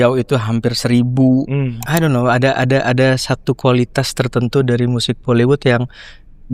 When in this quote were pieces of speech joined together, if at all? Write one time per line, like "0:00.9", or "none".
0:01.8